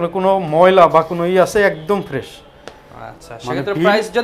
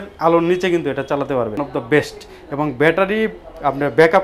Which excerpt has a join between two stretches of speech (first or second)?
second